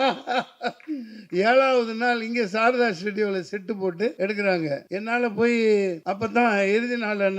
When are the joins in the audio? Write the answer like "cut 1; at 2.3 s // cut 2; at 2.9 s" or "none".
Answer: cut 1; at 4.1 s // cut 2; at 4.9 s // cut 3; at 6.0 s